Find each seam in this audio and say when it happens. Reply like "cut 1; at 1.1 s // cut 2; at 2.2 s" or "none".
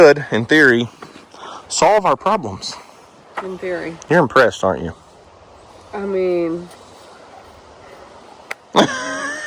none